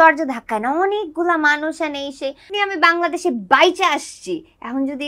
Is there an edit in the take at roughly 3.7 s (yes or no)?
no